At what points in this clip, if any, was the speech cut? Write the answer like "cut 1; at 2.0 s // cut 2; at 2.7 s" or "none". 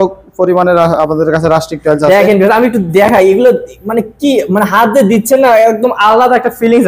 none